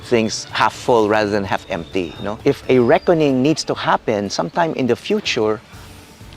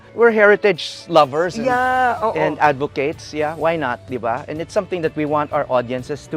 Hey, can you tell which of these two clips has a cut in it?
first; 1 cut; at 2.4 s

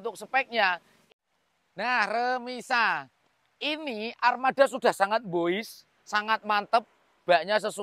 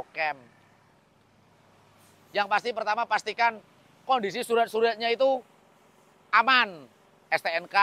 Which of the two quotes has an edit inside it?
first; 1 cut; at 0.9 s

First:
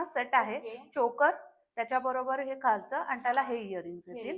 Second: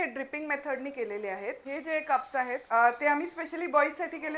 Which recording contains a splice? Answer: second; 2 cuts; at 1.6 s, 2.6 s

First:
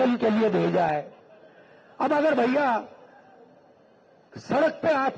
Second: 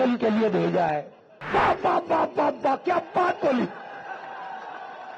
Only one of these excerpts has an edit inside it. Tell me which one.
second; 1 cut; at 1.4 s

